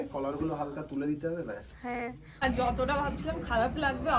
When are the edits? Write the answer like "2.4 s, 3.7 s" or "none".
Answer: 2.4 s